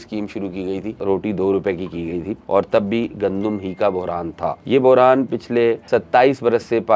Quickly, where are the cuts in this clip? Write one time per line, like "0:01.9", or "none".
0:01.0
0:02.4
0:04.6
0:05.8